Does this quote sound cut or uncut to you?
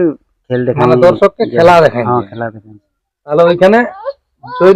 cut